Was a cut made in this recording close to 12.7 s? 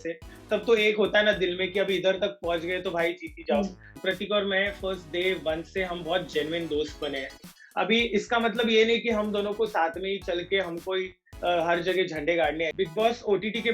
yes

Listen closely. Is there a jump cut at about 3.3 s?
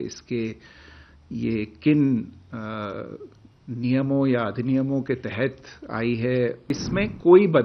no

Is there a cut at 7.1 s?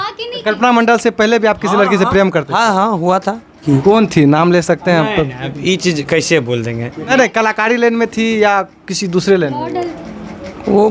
yes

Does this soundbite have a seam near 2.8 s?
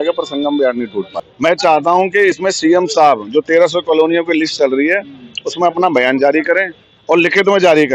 no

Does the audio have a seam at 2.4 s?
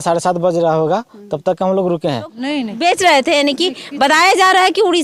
yes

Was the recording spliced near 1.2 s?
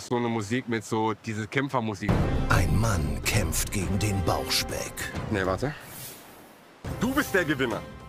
no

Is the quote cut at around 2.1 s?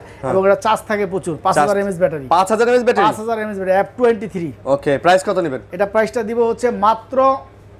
no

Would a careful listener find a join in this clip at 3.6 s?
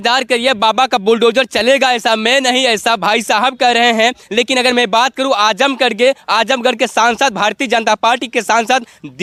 no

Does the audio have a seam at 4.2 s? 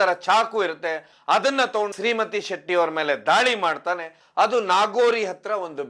yes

